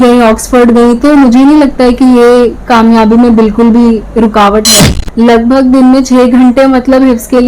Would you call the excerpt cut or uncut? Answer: cut